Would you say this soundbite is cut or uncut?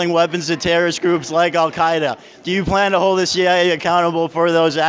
uncut